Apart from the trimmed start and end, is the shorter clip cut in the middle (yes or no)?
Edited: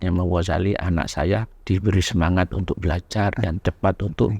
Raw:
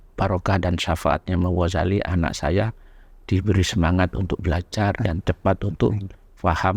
yes